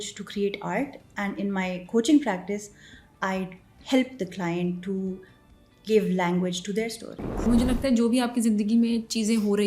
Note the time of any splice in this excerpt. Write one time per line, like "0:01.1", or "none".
0:07.5